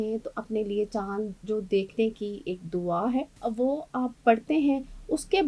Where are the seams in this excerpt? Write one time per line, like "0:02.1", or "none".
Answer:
0:03.3